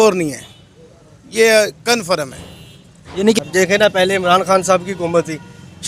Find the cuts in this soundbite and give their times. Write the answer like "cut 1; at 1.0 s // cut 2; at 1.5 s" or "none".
cut 1; at 3.4 s